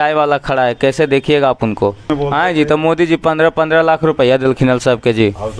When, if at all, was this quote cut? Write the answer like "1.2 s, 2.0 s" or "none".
2.1 s